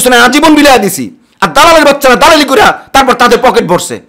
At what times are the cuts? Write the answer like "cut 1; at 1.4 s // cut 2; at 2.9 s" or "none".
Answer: none